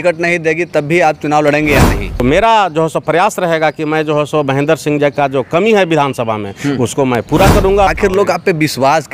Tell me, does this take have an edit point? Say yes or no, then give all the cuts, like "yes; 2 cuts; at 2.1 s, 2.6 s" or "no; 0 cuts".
yes; 2 cuts; at 2.1 s, 7.9 s